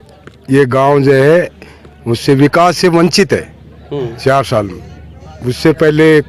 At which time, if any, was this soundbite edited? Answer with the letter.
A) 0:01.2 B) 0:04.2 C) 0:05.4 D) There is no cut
D